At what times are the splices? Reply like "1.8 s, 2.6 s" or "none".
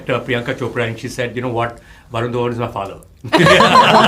none